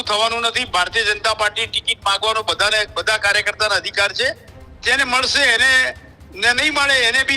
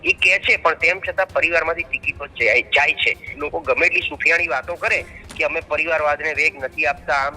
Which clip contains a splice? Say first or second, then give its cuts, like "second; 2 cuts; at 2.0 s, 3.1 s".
second; 1 cut; at 3.3 s